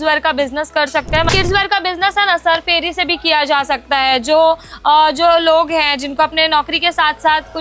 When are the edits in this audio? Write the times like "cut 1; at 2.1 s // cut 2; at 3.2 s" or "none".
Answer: cut 1; at 1.3 s